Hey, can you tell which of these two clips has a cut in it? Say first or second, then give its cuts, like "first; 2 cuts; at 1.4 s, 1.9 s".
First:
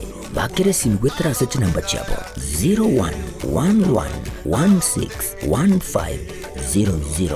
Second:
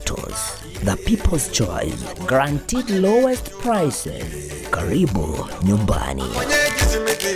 second; 1 cut; at 6.3 s